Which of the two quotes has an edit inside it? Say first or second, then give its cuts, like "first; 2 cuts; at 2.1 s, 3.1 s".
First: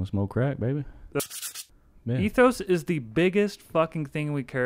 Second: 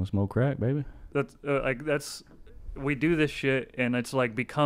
first; 1 cut; at 1.3 s